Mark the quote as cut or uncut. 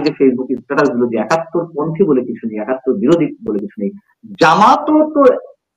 uncut